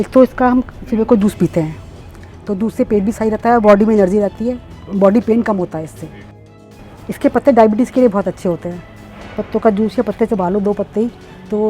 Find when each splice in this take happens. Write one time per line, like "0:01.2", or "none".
0:06.4